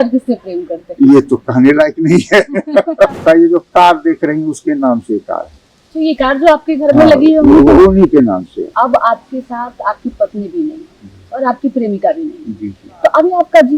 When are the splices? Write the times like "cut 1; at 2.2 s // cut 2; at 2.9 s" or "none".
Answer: cut 1; at 3.2 s // cut 2; at 8.7 s